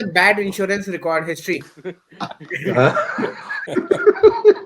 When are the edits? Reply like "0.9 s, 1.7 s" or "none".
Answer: 3.5 s